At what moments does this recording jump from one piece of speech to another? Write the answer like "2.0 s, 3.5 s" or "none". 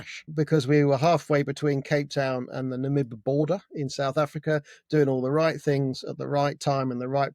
none